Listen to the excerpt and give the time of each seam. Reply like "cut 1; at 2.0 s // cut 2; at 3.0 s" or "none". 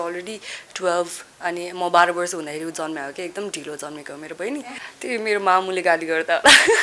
cut 1; at 4.8 s